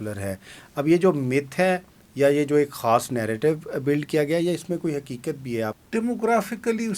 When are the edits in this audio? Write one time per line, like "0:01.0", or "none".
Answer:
0:05.8